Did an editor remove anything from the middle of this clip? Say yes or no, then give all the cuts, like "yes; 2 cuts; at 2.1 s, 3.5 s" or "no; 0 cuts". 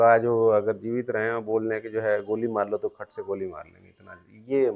no; 0 cuts